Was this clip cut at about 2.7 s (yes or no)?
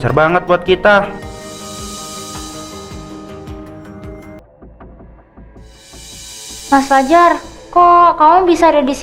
no